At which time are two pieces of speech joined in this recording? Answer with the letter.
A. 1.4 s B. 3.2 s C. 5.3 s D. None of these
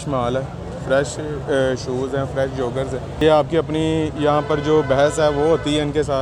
B